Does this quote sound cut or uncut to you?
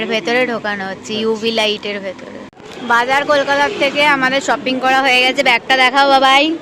cut